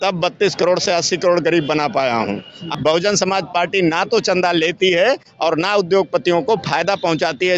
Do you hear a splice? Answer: yes; 1 cut; at 2.6 s

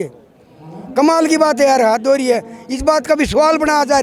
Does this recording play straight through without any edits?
yes; 0 cuts

